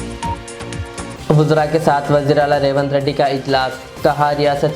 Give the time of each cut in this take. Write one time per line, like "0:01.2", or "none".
0:01.1